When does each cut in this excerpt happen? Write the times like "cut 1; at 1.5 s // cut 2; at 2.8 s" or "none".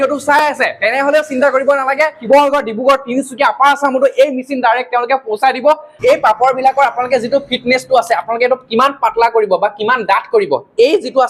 cut 1; at 2.2 s // cut 2; at 5.9 s